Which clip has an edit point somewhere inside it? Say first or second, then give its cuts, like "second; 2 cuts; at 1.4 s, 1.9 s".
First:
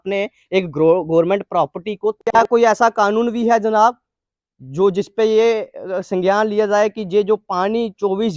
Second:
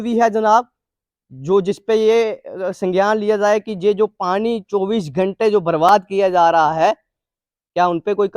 first; 1 cut; at 2.3 s